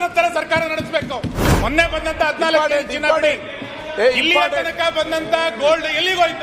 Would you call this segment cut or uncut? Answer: cut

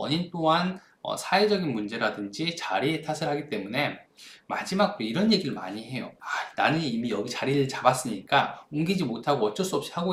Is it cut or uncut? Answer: uncut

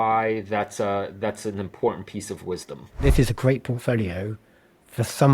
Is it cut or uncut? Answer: cut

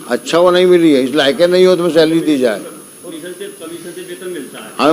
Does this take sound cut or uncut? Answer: cut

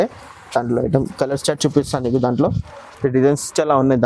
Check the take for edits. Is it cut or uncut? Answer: uncut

